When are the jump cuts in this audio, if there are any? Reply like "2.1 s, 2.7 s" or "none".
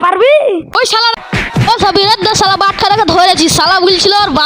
1.2 s